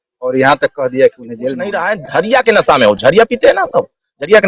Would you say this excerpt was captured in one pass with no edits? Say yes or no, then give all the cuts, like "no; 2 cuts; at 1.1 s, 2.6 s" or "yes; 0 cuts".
no; 1 cut; at 1.8 s